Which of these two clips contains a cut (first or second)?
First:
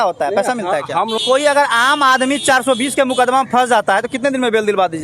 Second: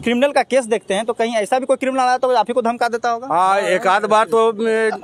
first